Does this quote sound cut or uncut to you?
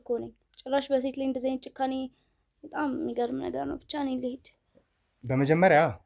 uncut